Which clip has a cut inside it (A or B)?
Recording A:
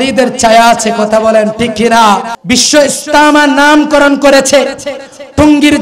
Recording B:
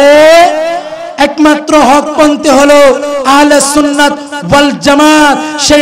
A